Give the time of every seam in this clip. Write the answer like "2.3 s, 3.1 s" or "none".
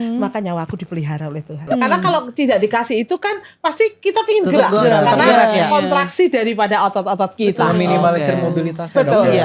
1.6 s